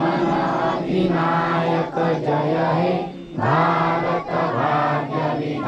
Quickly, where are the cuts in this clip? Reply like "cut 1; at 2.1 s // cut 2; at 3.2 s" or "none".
none